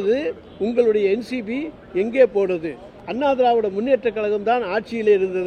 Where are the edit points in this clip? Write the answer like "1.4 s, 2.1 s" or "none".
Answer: 3.0 s